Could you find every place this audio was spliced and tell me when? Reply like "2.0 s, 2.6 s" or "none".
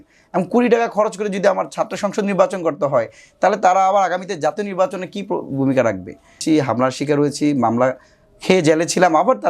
6.4 s

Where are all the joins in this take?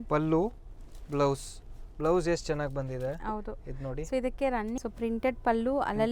4.8 s

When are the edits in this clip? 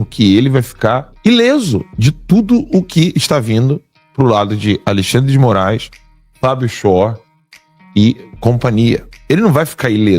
1.1 s, 1.9 s, 9.1 s

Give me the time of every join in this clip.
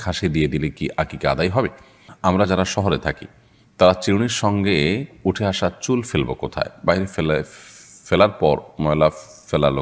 2.1 s

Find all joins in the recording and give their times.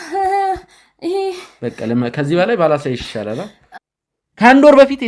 3.6 s

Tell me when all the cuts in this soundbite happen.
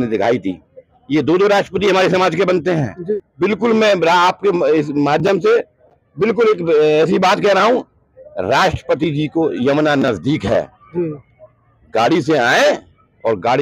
3.3 s

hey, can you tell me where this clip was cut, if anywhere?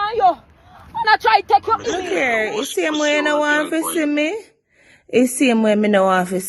2.0 s

